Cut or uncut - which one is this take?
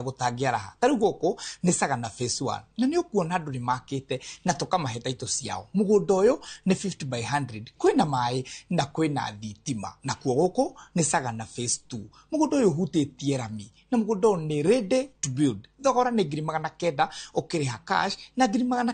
uncut